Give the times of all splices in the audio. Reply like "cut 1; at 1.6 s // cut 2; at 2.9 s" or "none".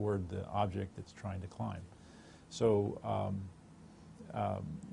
cut 1; at 2.8 s

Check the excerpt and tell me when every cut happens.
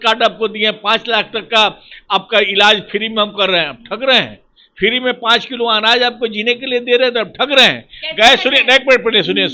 none

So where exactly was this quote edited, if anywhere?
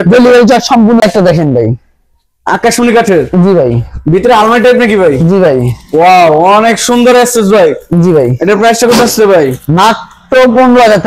cut 1; at 1.0 s

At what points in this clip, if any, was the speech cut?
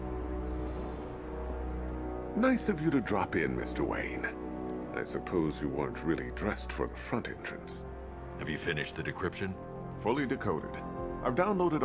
cut 1; at 10.4 s

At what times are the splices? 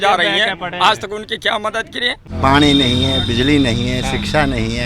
cut 1; at 2.3 s

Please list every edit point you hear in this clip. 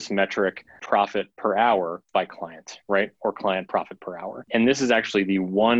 cut 1; at 1.1 s // cut 2; at 2.0 s // cut 3; at 4.5 s

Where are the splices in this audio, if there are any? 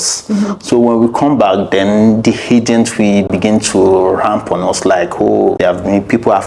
cut 1; at 5.6 s

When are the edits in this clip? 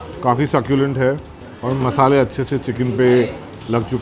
none

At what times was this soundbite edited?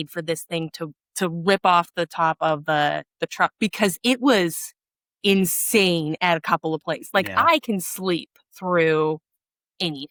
none

